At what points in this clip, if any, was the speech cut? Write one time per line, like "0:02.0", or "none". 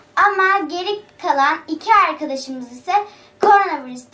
none